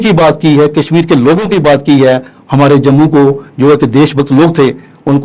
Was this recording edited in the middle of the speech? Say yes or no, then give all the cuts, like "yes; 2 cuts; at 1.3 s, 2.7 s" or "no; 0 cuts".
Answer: no; 0 cuts